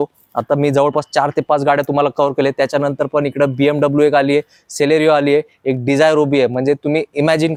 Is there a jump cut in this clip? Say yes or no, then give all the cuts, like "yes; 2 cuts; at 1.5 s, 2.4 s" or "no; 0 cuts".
no; 0 cuts